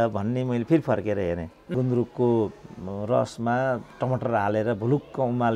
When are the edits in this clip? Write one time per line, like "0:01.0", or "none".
0:01.7